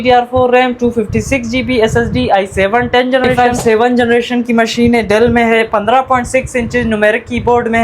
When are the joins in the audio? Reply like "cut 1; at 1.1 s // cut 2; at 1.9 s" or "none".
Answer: cut 1; at 3.3 s